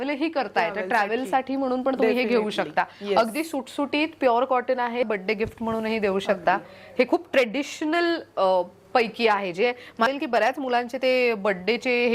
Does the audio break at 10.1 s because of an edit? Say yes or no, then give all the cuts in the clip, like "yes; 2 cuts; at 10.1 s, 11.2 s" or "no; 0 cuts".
yes; 2 cuts; at 5.0 s, 10.1 s